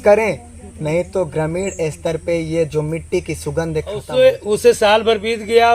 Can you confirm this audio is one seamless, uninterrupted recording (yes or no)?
no